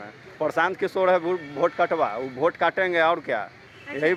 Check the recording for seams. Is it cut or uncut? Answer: uncut